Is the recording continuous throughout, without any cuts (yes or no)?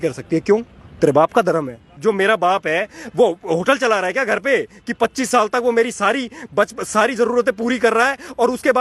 no